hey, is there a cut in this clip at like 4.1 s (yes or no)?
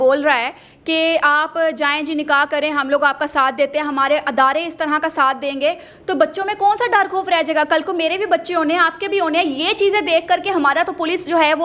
no